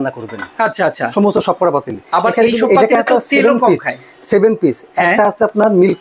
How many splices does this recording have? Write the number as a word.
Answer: zero